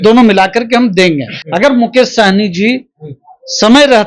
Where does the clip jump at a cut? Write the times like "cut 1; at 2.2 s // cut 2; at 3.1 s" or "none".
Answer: cut 1; at 1.4 s